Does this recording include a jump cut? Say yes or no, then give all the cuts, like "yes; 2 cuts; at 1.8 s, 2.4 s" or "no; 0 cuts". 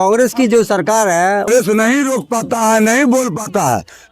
yes; 1 cut; at 1.5 s